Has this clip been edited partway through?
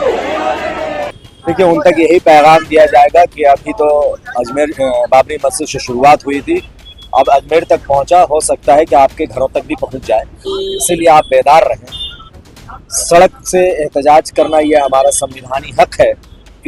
no; 0 cuts

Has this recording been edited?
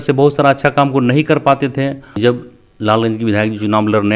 yes; 1 cut; at 2.3 s

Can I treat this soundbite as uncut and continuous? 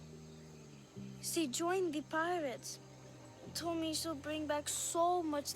no; 1 cut; at 1.0 s

